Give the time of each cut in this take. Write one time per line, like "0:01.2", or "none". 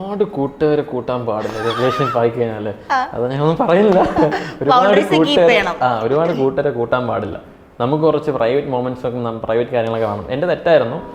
none